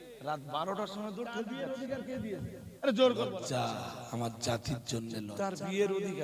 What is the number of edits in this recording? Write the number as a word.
four